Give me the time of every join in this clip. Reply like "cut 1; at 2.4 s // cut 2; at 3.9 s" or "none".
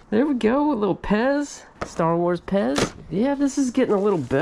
none